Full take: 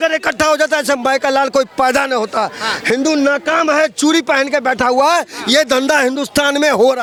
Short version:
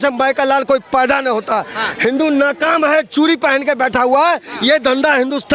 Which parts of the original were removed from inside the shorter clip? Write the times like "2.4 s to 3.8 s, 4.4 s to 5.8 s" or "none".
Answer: none